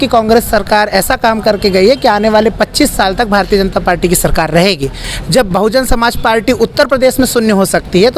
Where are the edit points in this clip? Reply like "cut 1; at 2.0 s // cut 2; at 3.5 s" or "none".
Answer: cut 1; at 5.1 s